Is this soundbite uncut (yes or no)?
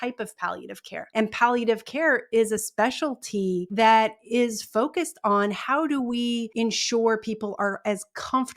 no